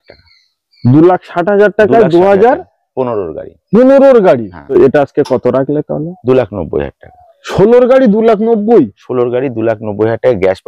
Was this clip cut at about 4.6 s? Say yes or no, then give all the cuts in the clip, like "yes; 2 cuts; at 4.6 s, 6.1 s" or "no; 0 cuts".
yes; 1 cut; at 4.6 s